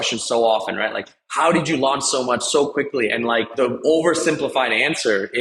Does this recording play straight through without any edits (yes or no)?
no